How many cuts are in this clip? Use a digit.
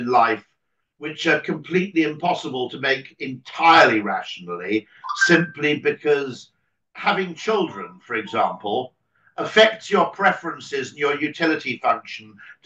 0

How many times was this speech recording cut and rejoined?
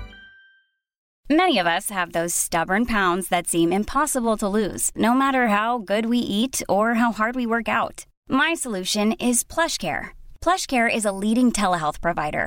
1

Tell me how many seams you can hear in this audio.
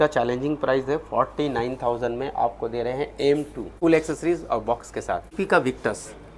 2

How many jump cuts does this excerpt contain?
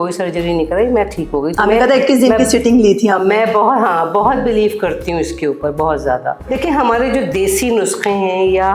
1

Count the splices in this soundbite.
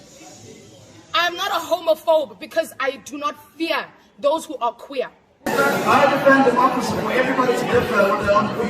1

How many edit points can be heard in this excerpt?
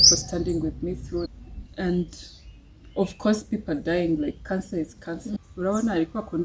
2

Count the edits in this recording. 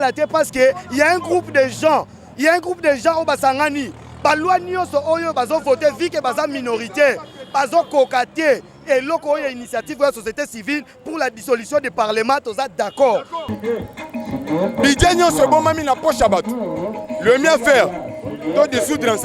1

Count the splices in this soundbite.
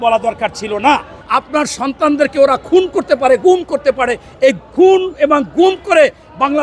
1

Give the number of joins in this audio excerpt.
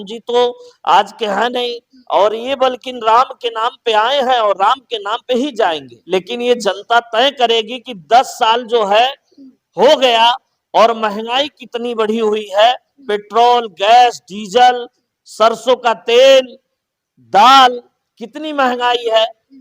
1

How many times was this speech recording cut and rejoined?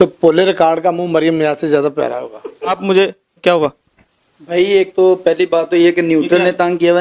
1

